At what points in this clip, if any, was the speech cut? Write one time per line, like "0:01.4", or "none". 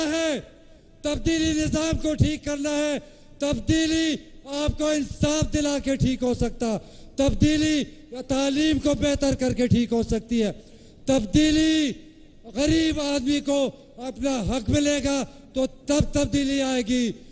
0:06.4